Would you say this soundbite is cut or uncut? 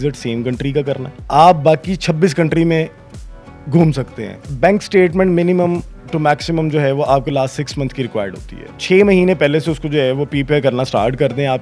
cut